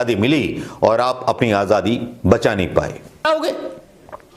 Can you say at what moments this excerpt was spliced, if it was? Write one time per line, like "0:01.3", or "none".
0:03.3